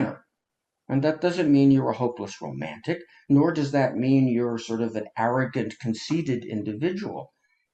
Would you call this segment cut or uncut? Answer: uncut